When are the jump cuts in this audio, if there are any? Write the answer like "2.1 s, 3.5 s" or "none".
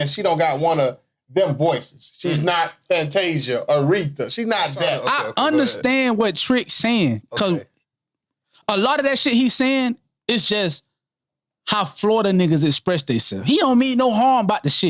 5.0 s

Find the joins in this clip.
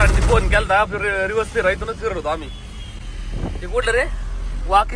none

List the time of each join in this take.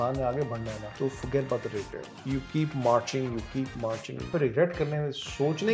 0.9 s, 2.1 s, 4.3 s

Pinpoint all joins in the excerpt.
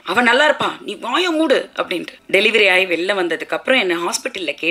2.1 s

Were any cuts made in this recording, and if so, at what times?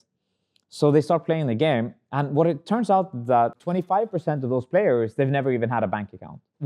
3.6 s

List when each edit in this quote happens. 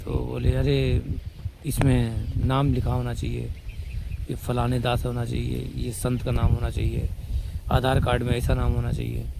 none

